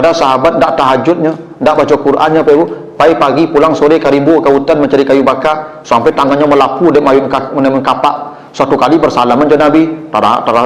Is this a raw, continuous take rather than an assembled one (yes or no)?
yes